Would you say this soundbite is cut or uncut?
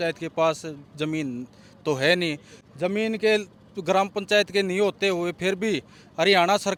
uncut